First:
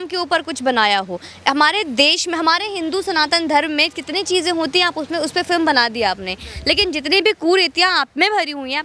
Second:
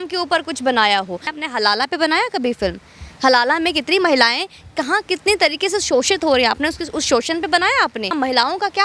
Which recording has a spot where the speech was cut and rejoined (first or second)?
second